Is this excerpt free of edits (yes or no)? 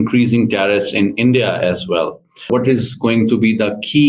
no